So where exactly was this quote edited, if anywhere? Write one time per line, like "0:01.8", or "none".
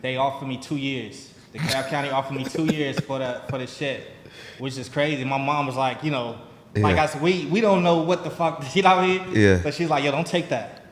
none

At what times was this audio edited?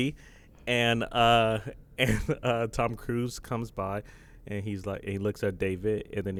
none

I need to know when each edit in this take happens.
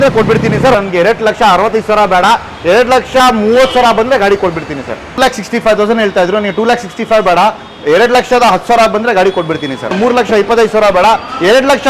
0:00.8
0:05.2
0:09.9

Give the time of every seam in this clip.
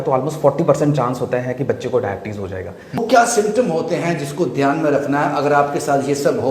0:03.0

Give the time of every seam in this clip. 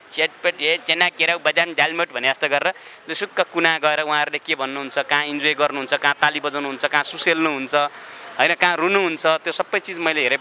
none

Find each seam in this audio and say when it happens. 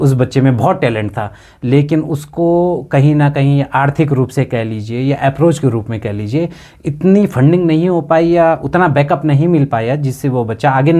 none

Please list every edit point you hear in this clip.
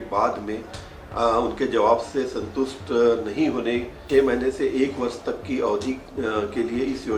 0:04.0

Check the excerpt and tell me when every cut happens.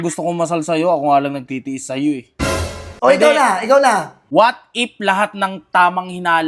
0:02.8
0:04.2

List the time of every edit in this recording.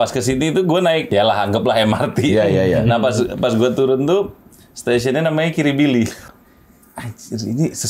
0:01.1
0:06.2

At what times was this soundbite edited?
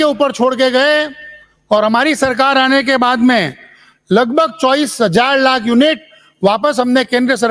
none

